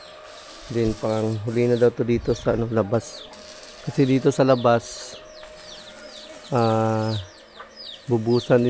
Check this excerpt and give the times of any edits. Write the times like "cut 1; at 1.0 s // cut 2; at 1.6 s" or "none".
none